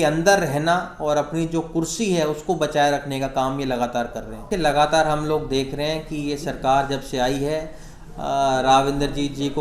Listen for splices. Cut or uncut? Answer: cut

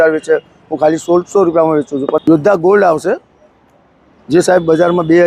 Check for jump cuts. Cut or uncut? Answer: cut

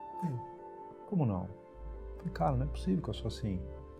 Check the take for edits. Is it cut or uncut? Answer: cut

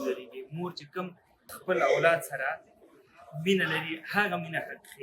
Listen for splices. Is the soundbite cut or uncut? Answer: cut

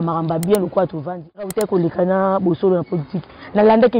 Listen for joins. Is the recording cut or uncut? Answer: cut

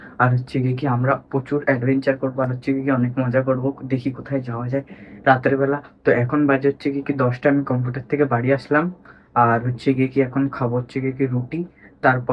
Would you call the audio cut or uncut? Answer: uncut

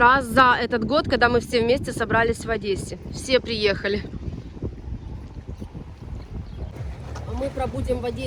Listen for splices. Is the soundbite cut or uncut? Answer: uncut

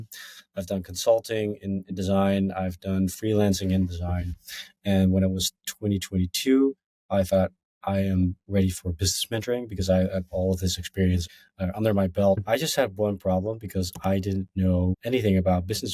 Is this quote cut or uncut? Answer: cut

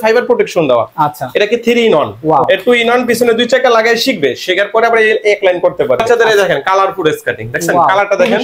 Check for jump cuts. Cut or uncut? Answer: cut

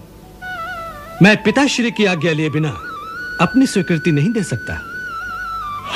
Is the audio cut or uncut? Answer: uncut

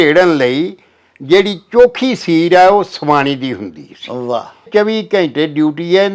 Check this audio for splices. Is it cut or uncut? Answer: cut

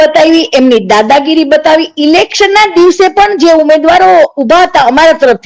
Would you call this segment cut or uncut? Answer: uncut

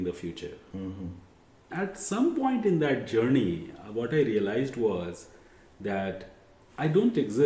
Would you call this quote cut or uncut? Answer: cut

